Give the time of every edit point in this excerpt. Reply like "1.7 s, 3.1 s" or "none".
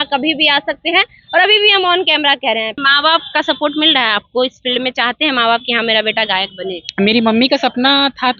2.8 s

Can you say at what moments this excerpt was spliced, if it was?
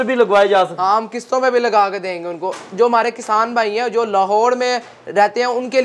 none

